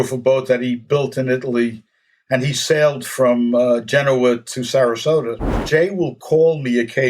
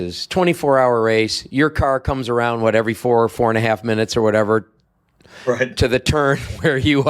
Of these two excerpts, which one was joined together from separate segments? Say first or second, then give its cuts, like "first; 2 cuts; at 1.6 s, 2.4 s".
first; 1 cut; at 5.5 s